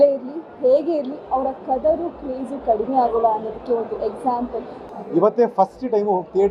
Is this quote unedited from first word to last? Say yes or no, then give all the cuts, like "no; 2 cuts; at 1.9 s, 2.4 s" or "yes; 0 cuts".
no; 1 cut; at 4.9 s